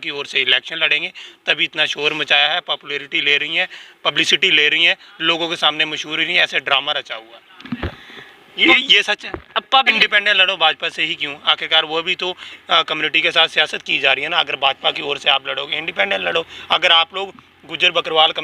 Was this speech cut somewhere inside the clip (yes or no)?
yes